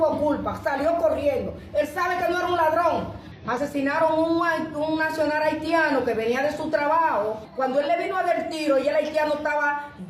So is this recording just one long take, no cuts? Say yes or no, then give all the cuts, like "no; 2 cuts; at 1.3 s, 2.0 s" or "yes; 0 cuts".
no; 2 cuts; at 3.2 s, 7.4 s